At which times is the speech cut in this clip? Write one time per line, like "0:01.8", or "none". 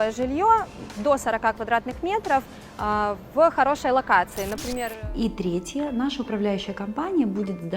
0:04.8